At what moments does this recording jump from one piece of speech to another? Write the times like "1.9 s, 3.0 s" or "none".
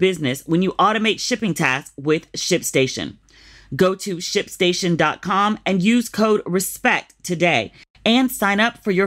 none